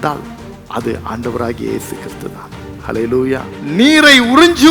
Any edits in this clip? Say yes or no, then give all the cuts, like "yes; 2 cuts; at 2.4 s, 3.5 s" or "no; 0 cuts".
yes; 1 cut; at 3.5 s